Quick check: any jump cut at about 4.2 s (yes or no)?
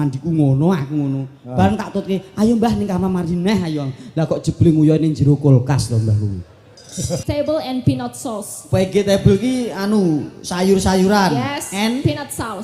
no